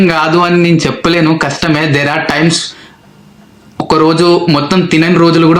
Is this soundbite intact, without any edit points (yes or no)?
yes